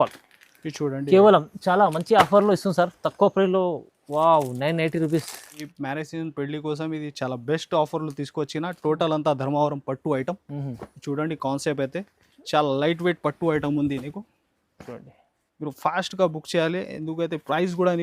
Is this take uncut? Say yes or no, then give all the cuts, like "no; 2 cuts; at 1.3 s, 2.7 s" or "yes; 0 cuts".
no; 1 cut; at 5.7 s